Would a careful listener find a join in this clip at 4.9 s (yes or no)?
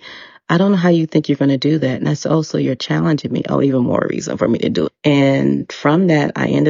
yes